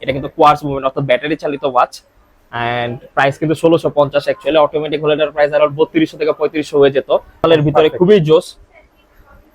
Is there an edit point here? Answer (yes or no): yes